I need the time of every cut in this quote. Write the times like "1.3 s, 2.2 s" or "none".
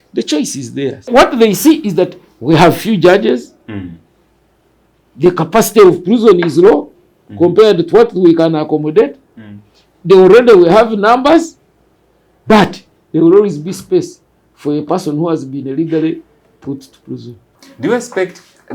1.1 s, 17.5 s